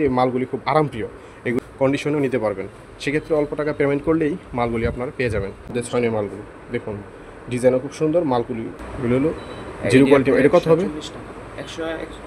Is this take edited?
yes; 3 cuts; at 1.6 s, 5.7 s, 8.7 s

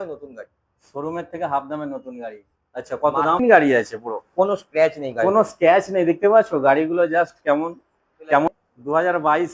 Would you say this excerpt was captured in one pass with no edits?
no; 2 cuts; at 3.4 s, 8.5 s

